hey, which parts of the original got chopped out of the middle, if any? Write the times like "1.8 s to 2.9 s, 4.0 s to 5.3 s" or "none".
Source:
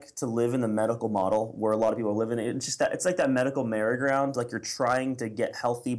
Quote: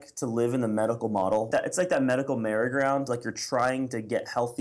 1.5 s to 2.7 s